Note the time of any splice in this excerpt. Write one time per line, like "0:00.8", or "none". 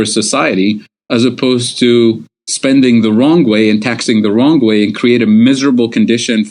none